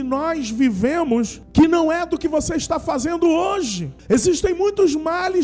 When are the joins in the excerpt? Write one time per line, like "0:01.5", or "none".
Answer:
0:01.4
0:03.9